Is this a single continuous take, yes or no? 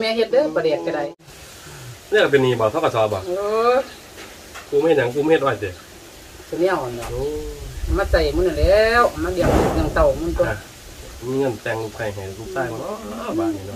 no